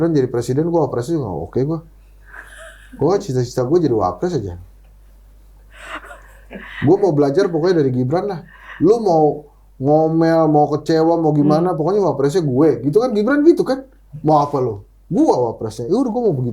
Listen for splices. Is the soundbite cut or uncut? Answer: uncut